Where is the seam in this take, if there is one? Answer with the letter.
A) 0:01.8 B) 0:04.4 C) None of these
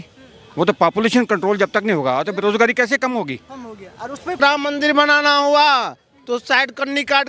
B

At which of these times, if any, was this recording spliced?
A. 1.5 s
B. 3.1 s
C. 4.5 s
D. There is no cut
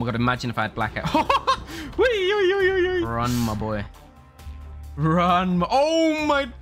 B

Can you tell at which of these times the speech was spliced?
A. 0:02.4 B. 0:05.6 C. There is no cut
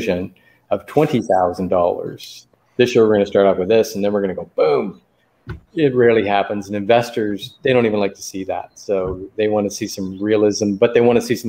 A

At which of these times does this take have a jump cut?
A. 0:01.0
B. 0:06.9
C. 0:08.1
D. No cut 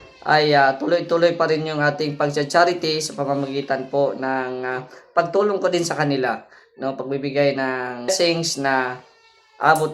C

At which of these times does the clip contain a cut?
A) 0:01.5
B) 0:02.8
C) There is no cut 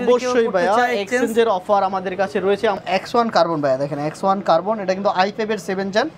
B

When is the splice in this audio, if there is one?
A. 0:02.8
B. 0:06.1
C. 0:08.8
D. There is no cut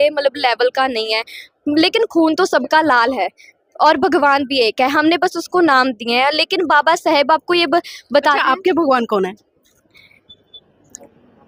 D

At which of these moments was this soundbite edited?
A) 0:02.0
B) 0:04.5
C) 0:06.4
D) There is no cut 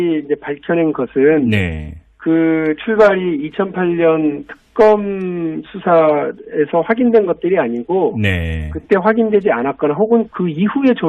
C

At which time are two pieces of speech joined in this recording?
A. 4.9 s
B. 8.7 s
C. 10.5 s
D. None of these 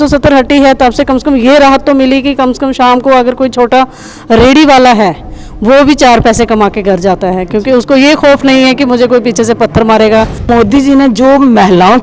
C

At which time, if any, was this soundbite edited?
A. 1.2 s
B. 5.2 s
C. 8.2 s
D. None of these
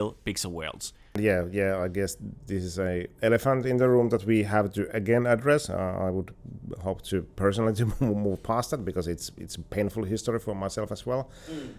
A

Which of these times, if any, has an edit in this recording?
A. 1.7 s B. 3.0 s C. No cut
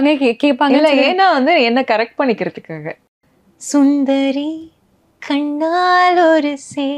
B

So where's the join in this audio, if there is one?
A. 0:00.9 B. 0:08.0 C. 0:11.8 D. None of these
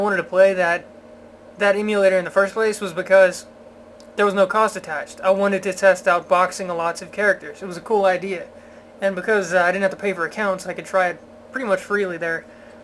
C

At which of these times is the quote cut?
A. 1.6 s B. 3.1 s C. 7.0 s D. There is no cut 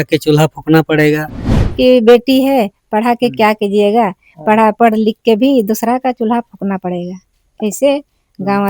A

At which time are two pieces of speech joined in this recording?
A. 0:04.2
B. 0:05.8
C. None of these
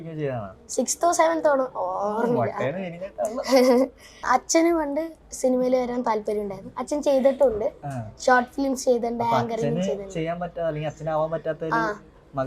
A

